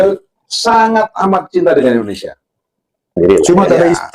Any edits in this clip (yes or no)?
yes